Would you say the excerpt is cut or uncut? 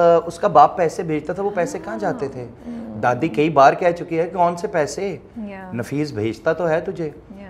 uncut